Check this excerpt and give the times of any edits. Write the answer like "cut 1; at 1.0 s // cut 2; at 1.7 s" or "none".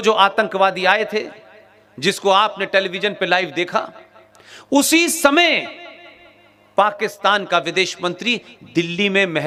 none